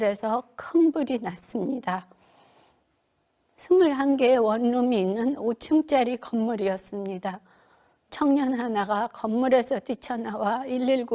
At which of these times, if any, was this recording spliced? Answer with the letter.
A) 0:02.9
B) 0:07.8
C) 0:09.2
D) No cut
A